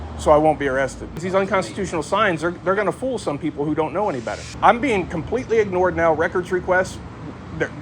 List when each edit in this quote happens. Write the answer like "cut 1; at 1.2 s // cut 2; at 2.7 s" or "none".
cut 1; at 1.2 s // cut 2; at 4.5 s